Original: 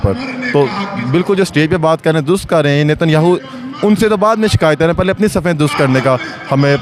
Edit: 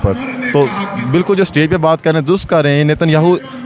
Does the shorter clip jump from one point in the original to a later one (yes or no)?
no